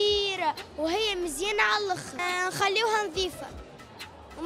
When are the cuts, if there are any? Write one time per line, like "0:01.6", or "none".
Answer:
0:02.2